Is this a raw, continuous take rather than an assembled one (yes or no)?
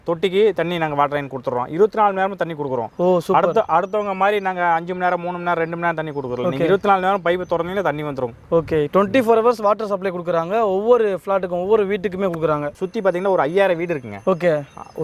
no